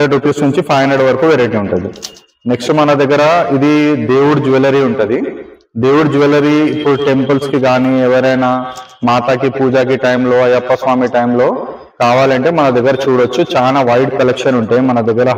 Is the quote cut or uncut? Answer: uncut